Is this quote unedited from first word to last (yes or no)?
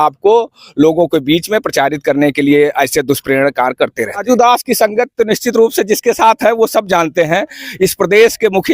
no